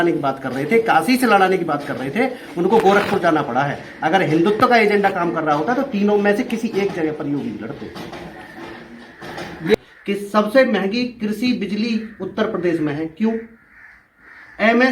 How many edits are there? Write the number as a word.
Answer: one